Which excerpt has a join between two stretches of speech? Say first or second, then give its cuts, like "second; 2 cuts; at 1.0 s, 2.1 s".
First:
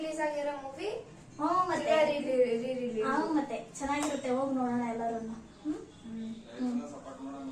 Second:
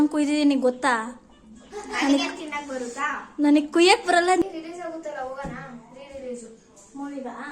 second; 1 cut; at 4.4 s